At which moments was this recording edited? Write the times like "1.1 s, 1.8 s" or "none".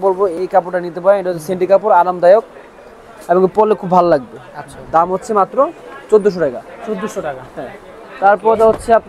none